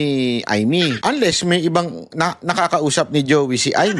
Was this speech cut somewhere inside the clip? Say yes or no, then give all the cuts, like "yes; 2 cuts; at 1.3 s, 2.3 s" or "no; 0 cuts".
yes; 1 cut; at 1.0 s